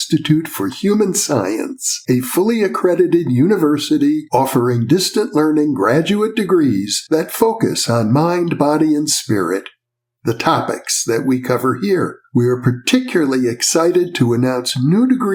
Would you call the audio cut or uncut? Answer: uncut